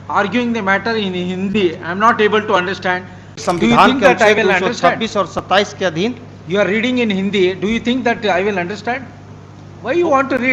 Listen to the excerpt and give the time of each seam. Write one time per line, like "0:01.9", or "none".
0:03.4